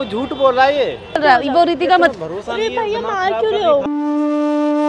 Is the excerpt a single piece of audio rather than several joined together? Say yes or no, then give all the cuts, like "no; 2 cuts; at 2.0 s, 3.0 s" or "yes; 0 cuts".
no; 1 cut; at 1.2 s